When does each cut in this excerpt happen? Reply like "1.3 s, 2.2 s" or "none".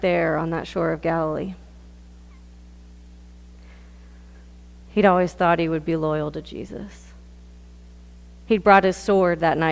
2.3 s